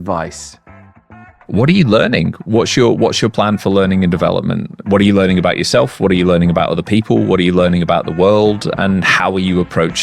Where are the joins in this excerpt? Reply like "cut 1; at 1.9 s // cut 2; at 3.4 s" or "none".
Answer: cut 1; at 1.0 s